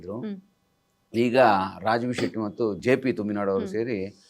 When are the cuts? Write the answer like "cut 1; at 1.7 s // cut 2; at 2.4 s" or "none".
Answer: cut 1; at 2.8 s